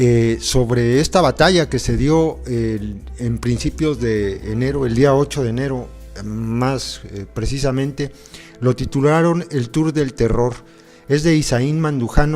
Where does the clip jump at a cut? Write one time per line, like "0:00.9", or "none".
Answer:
0:06.7

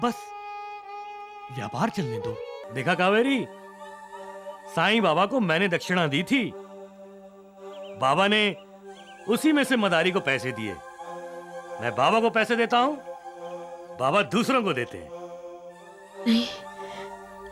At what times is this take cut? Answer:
0:02.6

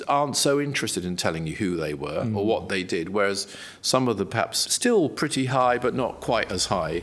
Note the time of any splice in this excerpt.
0:04.6

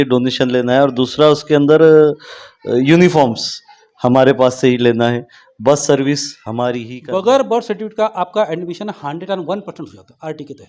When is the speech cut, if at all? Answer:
0:06.9

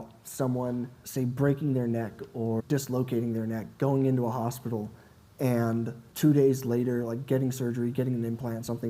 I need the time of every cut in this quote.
0:01.0
0:02.6

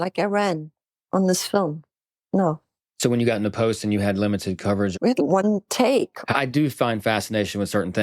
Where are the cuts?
0:04.9

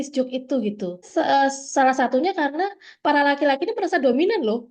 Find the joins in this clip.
0:01.1
0:02.8

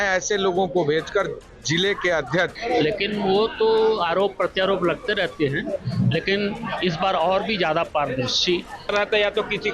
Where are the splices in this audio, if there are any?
0:02.6
0:08.9

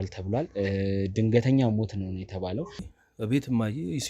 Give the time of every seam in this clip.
0:02.9

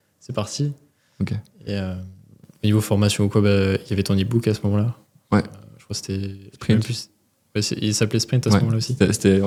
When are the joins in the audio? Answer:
none

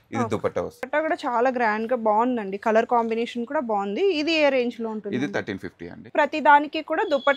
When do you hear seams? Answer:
0:00.9
0:06.1

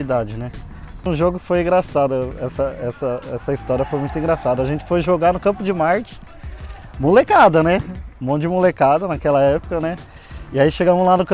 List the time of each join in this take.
0:01.1

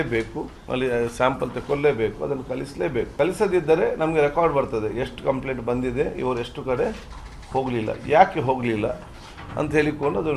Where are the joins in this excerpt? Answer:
0:03.1

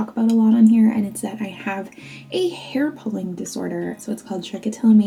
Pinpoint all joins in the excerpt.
none

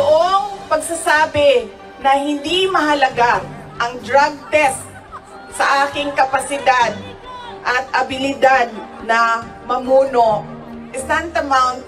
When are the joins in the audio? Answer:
none

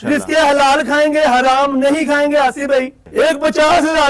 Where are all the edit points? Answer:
0:03.0

